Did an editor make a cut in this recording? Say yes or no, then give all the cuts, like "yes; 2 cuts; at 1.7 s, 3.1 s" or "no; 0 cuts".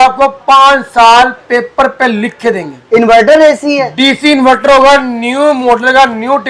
no; 0 cuts